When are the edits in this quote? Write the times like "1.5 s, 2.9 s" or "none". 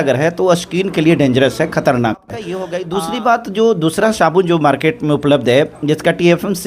2.7 s

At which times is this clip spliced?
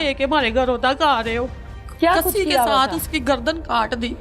1.7 s

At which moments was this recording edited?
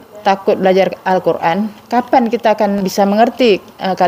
2.8 s

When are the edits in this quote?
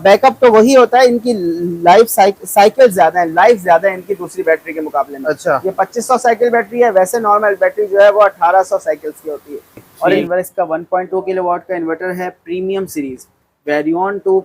10.2 s

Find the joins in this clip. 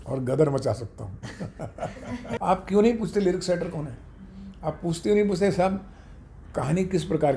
2.4 s

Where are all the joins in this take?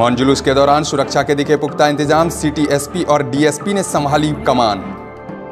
none

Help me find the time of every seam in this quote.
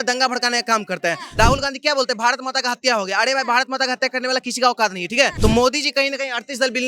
1.2 s, 5.3 s

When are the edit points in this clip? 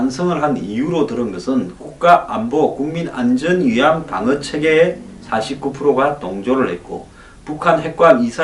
none

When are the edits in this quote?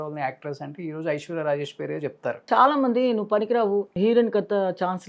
2.4 s, 3.9 s

